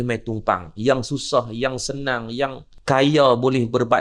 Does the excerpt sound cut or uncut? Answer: cut